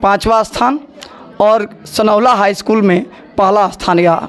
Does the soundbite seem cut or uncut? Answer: uncut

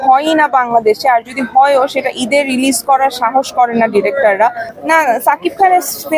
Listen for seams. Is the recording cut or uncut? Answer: cut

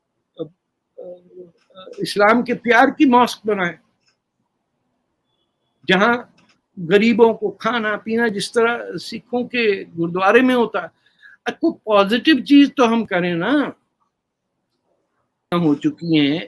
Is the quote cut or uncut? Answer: cut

